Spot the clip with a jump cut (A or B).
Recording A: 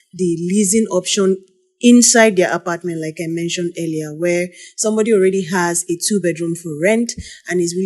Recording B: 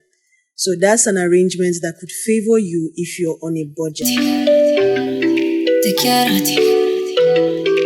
B